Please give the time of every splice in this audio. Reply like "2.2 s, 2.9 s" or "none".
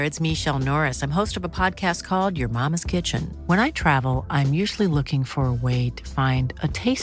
none